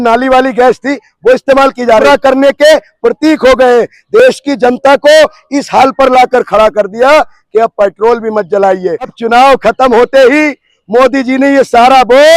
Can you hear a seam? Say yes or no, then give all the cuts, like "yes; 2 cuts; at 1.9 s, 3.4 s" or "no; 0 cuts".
yes; 2 cuts; at 2.0 s, 9.2 s